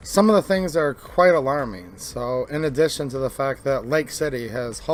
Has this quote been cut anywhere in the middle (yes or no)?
no